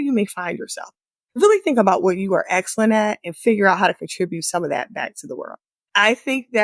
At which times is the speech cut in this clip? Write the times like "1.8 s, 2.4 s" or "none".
1.4 s